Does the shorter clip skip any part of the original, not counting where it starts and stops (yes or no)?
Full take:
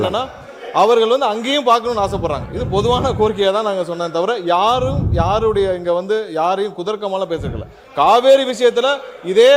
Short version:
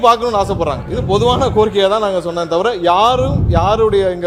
no